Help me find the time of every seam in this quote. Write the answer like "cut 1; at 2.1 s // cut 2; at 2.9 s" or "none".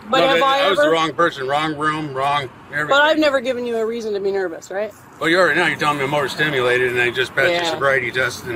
cut 1; at 5.0 s